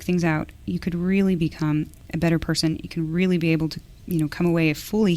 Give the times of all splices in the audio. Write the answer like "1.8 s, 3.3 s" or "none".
2.0 s